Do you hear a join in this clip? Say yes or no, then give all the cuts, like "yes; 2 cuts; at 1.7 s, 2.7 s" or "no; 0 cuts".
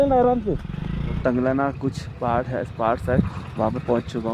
yes; 1 cut; at 1.2 s